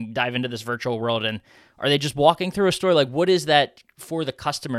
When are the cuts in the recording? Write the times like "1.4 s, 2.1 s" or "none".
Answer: none